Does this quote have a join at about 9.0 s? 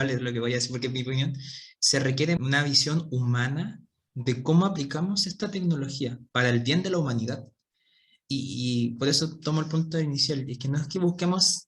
no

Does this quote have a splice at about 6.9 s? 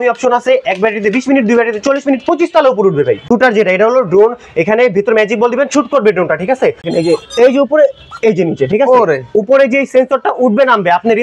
yes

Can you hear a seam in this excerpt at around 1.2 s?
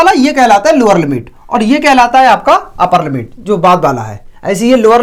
no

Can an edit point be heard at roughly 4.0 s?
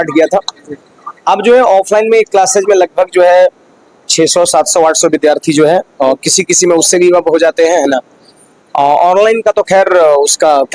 no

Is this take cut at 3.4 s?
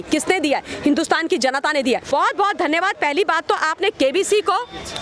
no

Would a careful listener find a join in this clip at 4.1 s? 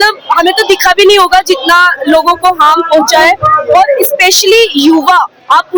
no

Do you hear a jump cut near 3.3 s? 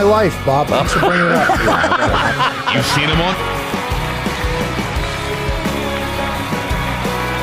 no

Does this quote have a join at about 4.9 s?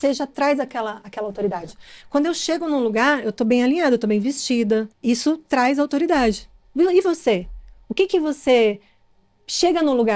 yes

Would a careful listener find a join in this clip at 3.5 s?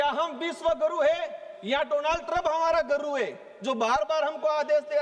no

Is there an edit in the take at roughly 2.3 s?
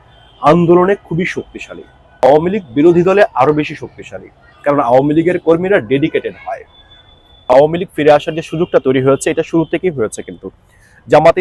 yes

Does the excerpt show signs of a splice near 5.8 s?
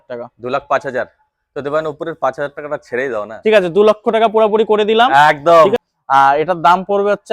yes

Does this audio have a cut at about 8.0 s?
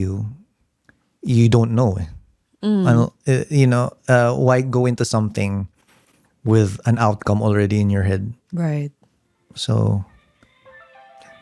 no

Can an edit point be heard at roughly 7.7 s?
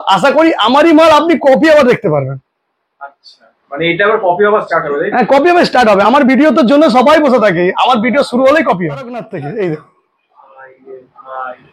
no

